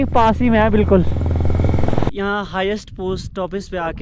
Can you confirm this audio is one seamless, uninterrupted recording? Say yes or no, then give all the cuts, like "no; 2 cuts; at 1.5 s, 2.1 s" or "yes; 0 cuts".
no; 1 cut; at 2.1 s